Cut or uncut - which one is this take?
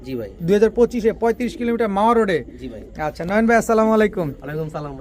uncut